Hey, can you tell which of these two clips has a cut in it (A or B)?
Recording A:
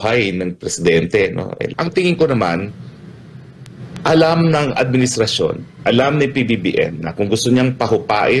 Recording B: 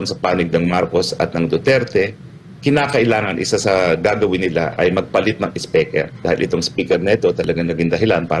A